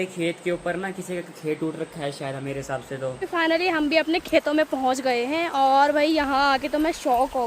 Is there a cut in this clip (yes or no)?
yes